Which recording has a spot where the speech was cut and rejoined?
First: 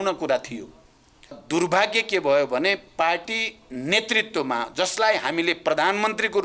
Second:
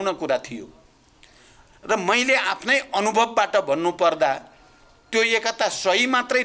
first; 1 cut; at 1.4 s

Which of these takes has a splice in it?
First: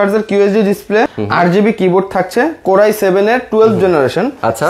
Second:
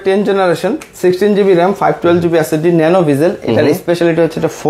first; 1 cut; at 1.2 s

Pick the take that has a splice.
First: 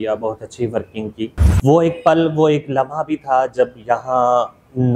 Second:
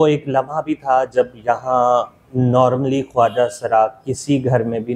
first; 1 cut; at 1.4 s

